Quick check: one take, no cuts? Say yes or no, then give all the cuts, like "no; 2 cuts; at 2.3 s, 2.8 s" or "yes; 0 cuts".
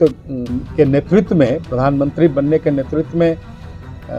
yes; 0 cuts